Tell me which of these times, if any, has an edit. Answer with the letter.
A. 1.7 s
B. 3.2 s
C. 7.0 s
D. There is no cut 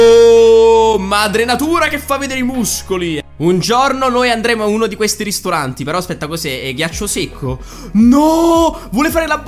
B